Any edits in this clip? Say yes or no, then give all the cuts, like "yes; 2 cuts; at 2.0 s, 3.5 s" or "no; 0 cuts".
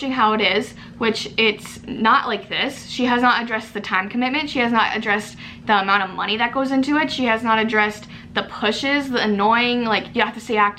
no; 0 cuts